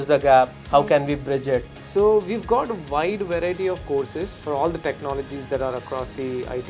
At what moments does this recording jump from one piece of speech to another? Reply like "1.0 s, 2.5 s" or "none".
1.8 s, 4.4 s